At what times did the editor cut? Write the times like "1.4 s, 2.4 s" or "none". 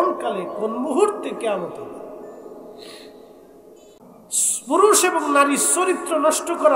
4.0 s

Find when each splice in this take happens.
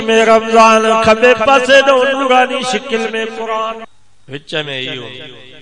3.8 s

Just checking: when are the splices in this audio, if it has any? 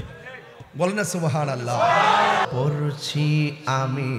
2.5 s

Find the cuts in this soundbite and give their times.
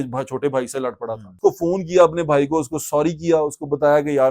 1.3 s

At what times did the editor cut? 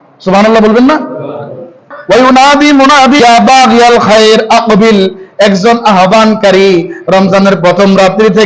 1.9 s, 3.2 s

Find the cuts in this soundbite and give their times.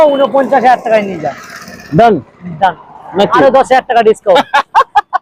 none

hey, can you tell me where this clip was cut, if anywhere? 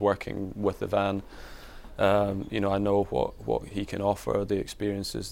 none

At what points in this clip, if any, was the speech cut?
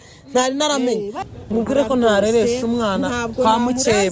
1.2 s

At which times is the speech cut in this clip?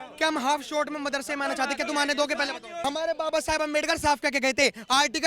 2.7 s

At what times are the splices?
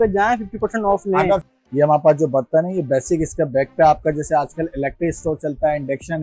1.4 s

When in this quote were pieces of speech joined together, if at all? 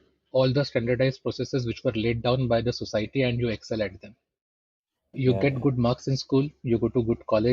5.1 s

